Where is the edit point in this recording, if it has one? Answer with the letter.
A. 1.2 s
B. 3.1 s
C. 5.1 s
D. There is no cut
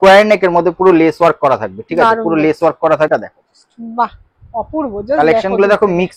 B